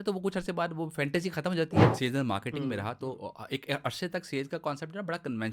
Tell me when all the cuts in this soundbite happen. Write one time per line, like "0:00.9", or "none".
0:01.9